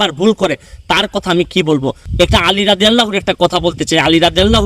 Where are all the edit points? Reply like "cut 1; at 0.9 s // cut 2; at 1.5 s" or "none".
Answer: cut 1; at 2.0 s